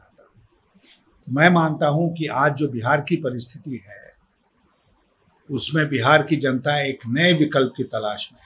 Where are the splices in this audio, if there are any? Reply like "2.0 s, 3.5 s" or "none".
1.2 s

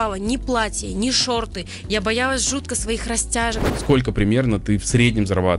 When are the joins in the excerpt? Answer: 3.7 s

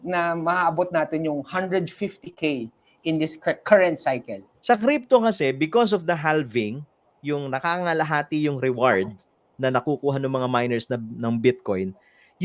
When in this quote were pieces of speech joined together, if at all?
4.5 s

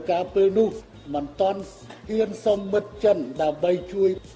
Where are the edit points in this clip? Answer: 0.9 s

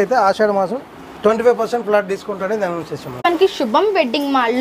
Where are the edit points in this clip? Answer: 3.2 s

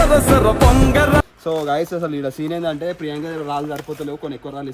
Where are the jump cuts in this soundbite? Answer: 1.3 s

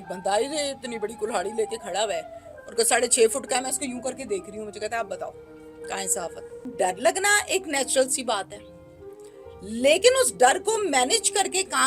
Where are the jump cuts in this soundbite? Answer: 6.7 s

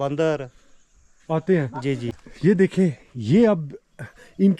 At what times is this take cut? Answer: 2.1 s

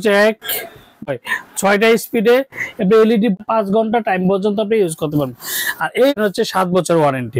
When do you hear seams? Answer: 0.9 s, 3.4 s, 6.2 s

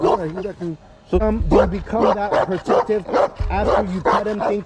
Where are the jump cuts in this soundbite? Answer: 1.2 s

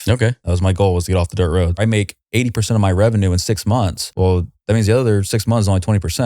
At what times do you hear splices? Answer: 1.8 s, 4.0 s

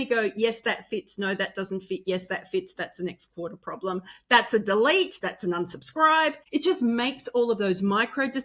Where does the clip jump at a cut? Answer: 6.4 s

